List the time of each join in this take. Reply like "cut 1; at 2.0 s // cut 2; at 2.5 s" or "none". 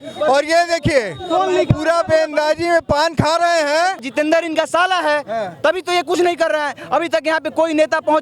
cut 1; at 4.0 s